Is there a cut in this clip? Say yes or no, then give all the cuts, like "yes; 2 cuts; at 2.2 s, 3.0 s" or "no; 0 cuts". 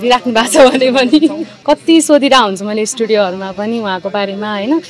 yes; 1 cut; at 1.5 s